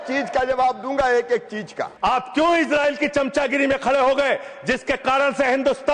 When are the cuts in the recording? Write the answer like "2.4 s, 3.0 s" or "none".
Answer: 1.8 s